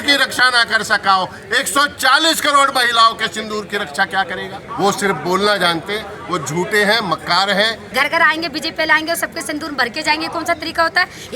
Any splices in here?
yes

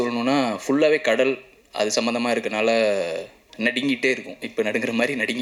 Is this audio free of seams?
yes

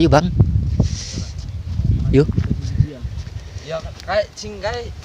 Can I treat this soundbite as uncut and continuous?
yes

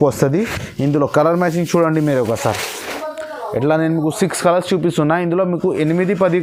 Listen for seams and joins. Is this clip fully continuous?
yes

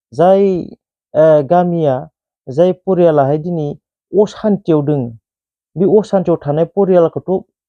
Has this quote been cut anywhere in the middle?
no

